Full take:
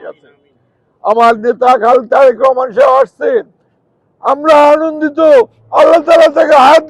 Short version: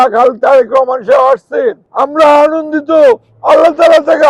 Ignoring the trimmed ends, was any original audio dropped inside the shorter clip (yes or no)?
yes